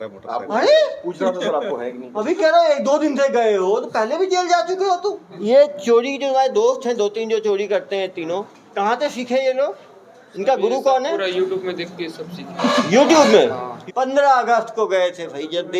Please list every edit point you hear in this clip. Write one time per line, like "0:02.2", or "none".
0:05.3
0:13.7